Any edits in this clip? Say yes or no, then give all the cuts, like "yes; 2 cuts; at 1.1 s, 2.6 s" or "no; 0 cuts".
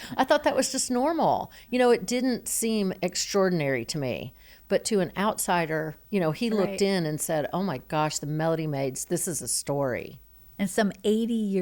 no; 0 cuts